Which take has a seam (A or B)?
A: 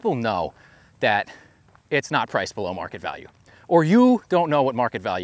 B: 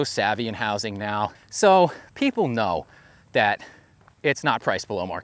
B